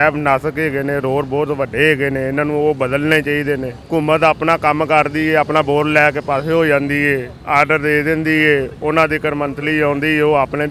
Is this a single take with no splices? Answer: yes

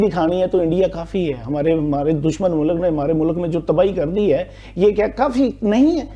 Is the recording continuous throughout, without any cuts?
yes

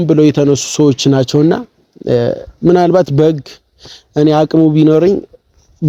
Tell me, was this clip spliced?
no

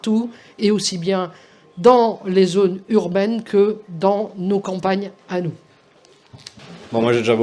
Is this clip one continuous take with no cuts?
yes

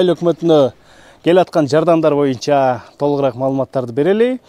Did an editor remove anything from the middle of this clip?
no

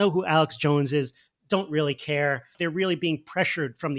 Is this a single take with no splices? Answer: no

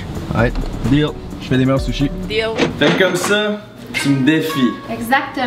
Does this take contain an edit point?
no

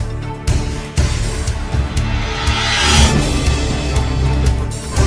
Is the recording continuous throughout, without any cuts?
no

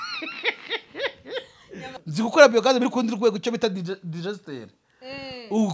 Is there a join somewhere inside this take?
yes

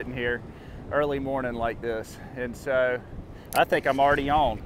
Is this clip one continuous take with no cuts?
yes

